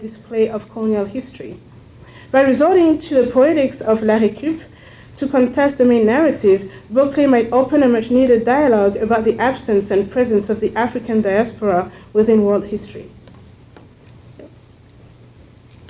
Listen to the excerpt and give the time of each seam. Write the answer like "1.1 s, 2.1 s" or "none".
3.7 s